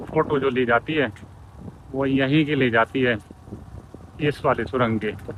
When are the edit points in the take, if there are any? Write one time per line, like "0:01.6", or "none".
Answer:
none